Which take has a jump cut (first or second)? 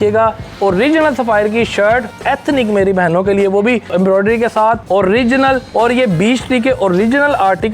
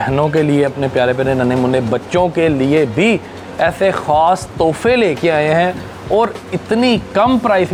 first